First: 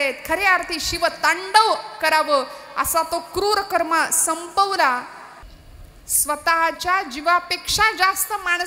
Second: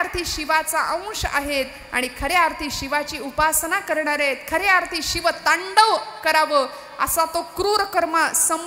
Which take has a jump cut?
first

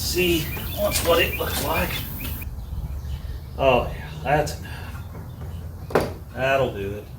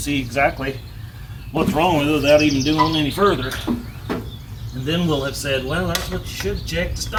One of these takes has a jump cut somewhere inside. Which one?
first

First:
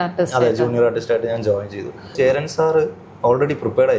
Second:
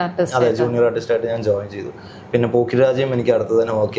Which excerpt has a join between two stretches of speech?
first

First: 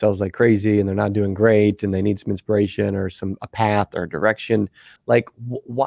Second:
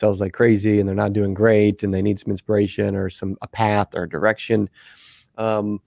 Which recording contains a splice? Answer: first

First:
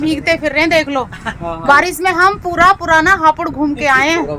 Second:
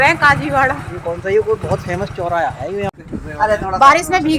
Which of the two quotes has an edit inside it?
second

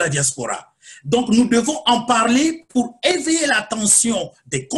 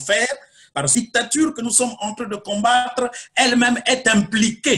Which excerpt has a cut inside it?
second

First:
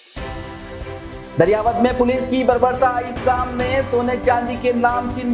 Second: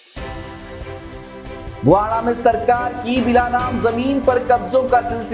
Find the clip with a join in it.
first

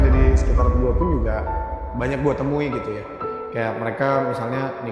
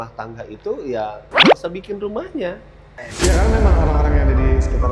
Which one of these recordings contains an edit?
second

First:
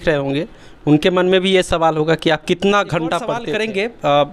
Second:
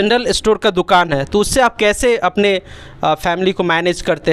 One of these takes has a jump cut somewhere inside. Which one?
first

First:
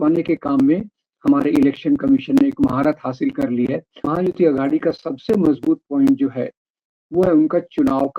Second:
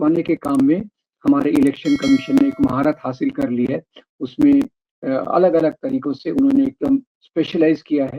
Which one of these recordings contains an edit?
first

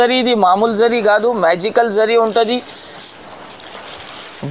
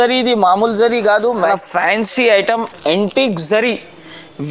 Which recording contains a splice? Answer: second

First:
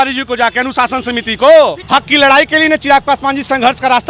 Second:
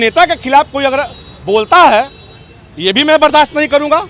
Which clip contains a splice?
first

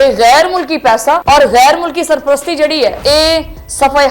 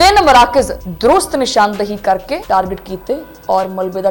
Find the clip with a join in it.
first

